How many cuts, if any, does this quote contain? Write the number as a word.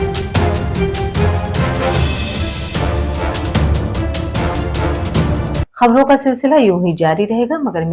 one